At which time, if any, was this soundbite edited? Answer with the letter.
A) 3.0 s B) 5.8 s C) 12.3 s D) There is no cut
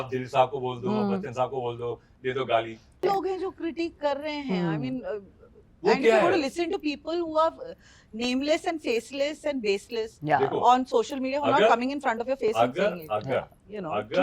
A